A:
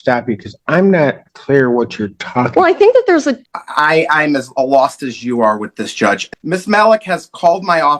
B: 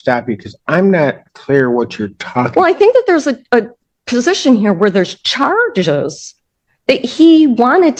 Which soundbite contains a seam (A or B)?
A